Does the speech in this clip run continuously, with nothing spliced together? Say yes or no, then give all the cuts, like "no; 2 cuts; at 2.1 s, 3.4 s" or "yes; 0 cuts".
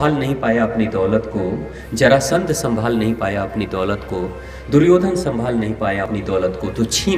no; 1 cut; at 6.1 s